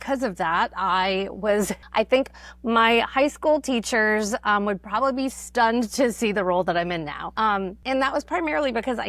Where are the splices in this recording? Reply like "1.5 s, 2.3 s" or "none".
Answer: 1.8 s, 7.6 s